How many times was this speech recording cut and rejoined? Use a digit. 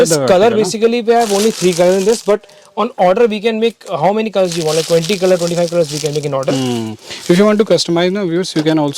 0